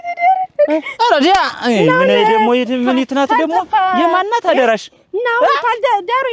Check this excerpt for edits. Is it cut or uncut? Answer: uncut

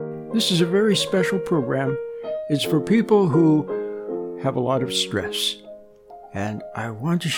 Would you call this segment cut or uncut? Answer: uncut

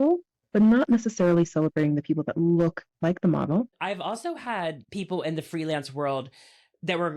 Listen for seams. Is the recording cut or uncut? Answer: cut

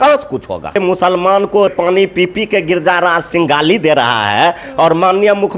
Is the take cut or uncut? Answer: cut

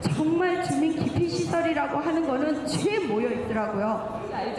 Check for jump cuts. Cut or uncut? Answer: uncut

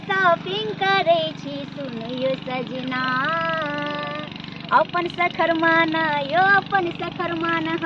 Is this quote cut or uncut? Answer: uncut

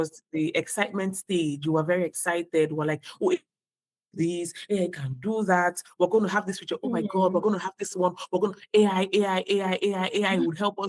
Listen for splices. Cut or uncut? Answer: uncut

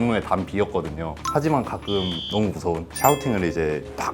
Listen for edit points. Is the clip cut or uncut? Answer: cut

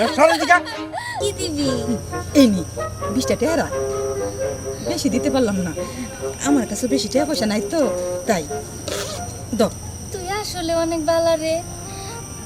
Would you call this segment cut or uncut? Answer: cut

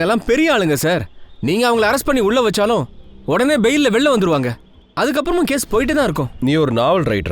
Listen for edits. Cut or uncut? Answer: cut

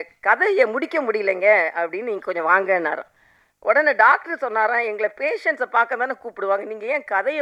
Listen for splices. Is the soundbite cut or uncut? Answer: uncut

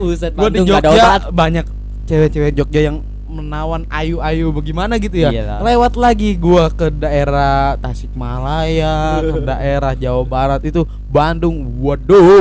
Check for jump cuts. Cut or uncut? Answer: uncut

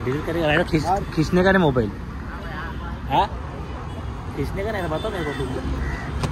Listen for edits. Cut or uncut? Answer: uncut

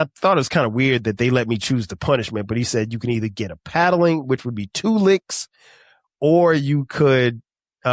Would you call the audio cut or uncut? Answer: uncut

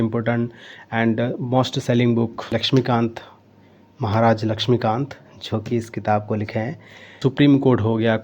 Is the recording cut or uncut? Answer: cut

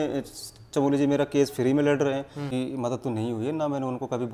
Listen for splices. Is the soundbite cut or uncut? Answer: cut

